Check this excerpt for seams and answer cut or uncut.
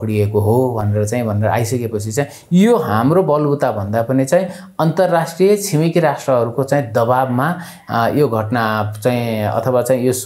uncut